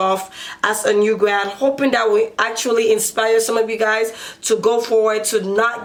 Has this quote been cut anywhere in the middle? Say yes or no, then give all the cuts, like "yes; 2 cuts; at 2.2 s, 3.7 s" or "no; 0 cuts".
no; 0 cuts